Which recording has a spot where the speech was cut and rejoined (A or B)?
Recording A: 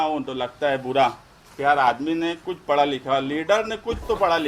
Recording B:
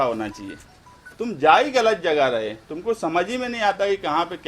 B